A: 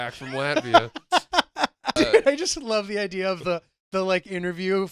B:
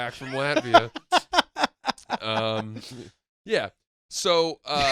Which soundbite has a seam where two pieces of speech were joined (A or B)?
A